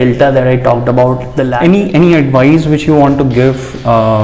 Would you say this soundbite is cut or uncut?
cut